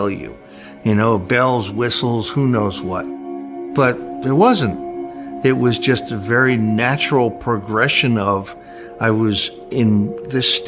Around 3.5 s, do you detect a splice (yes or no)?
yes